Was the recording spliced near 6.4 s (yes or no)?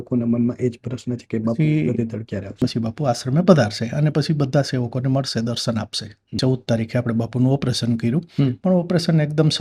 yes